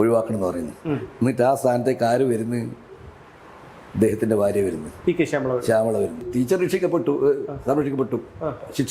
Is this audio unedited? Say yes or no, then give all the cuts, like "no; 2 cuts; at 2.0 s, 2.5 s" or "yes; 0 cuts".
no; 1 cut; at 6.3 s